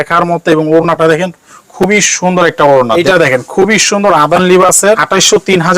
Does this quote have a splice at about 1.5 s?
no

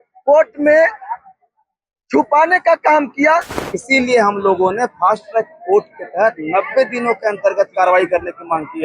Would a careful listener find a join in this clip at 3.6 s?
yes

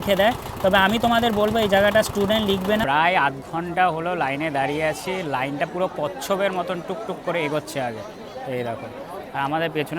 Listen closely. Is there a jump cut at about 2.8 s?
yes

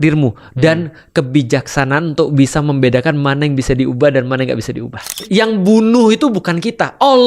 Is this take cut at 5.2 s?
yes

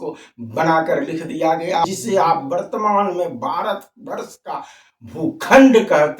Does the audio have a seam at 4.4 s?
no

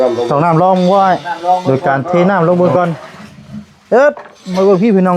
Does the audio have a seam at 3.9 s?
no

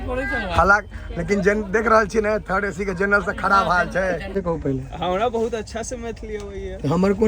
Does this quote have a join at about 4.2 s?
yes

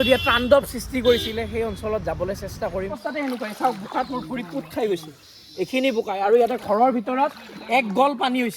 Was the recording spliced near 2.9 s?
yes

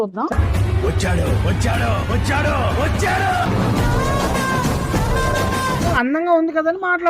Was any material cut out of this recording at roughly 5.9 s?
yes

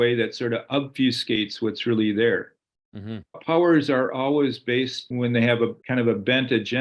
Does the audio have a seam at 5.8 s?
yes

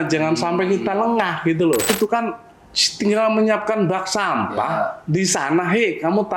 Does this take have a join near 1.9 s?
yes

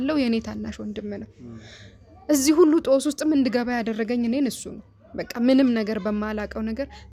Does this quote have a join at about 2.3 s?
no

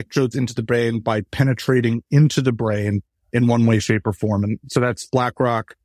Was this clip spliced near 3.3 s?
yes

